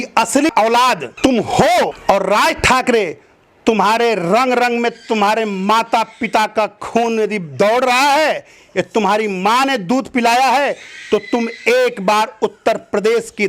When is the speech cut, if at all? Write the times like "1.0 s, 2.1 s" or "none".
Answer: none